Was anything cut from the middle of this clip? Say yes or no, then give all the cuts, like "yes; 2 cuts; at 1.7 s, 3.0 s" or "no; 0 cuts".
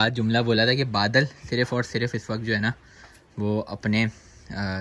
no; 0 cuts